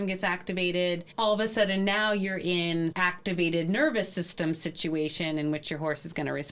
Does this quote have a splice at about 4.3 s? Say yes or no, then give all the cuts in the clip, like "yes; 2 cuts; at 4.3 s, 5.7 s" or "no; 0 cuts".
no; 1 cut; at 2.9 s